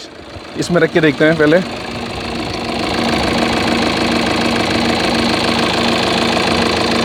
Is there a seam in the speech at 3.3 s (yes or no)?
no